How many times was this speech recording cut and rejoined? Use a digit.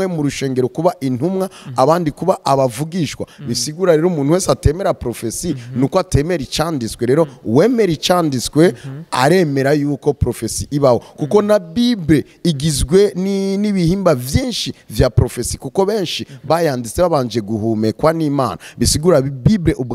0